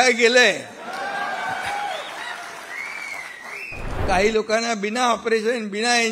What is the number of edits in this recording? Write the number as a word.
one